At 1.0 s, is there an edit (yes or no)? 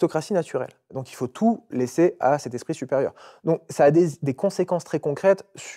yes